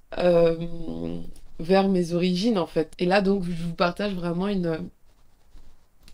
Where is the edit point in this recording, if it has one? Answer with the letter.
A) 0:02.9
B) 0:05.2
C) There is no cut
A